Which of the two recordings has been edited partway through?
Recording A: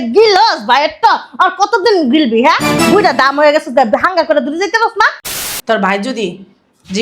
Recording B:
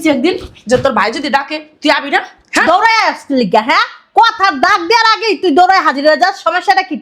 A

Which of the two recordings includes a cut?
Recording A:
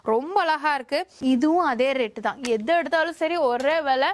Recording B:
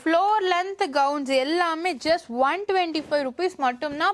A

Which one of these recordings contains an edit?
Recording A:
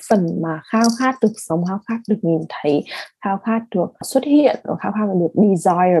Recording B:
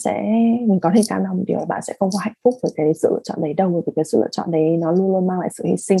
A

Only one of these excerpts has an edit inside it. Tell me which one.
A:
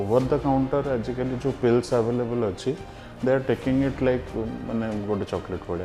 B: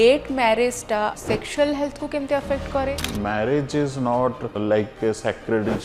B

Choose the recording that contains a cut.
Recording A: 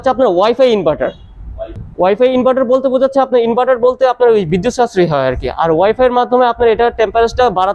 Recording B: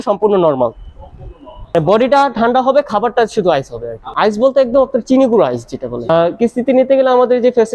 B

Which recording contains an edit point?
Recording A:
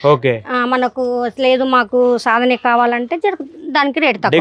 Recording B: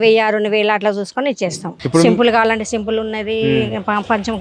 B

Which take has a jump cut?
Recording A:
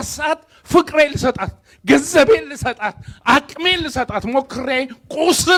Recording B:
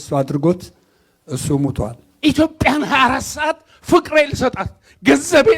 B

